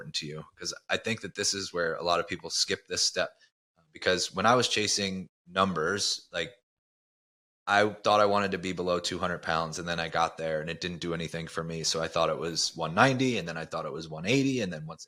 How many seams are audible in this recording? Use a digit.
0